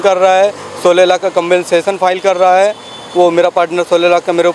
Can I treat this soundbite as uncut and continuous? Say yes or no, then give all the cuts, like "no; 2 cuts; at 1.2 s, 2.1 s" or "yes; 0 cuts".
yes; 0 cuts